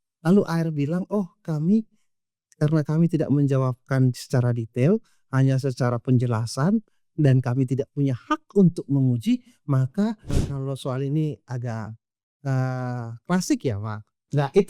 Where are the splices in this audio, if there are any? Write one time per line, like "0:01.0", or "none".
0:10.3